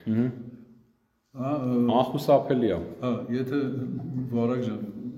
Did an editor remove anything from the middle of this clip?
no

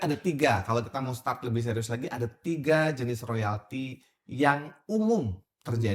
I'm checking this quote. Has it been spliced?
no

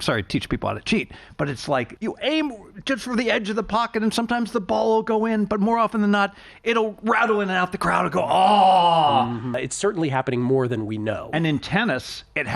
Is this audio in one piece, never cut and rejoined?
no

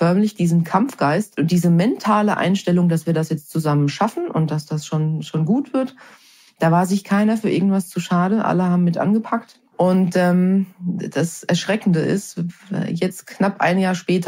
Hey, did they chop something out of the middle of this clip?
no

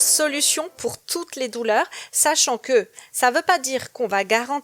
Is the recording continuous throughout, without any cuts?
yes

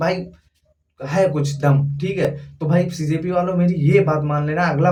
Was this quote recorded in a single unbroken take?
yes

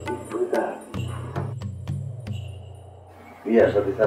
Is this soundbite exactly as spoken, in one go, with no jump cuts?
yes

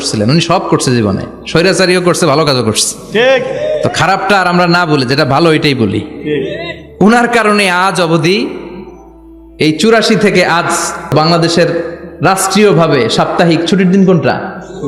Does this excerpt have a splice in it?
yes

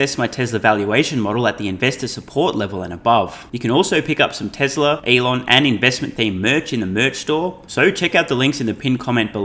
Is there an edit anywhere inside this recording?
yes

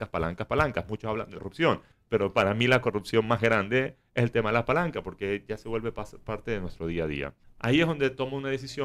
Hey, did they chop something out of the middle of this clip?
yes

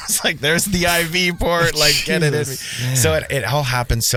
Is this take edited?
no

